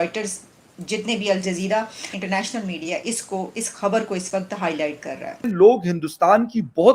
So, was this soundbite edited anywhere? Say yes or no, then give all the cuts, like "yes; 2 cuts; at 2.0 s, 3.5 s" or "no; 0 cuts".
yes; 2 cuts; at 2.1 s, 5.5 s